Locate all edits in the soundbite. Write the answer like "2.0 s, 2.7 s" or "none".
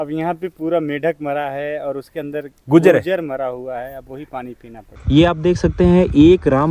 4.9 s